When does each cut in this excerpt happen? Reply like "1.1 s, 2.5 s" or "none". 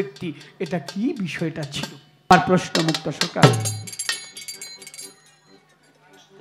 2.3 s

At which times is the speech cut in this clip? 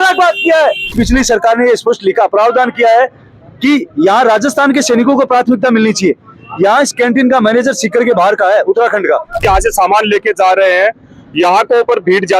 0.8 s, 9.3 s

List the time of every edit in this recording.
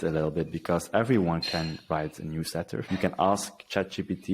2.8 s

